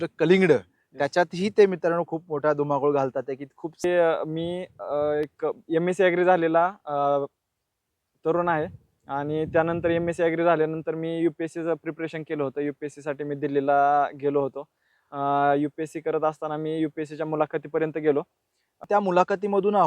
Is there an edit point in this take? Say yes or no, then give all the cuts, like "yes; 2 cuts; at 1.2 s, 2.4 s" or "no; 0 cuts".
yes; 2 cuts; at 3.8 s, 18.8 s